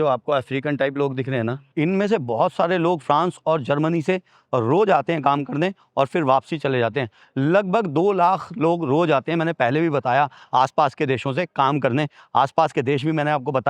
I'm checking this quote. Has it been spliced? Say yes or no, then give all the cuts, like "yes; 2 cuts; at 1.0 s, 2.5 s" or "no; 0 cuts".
no; 0 cuts